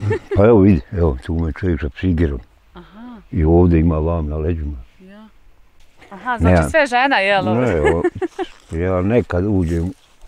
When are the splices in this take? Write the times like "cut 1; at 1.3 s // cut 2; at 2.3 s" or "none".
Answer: cut 1; at 5.6 s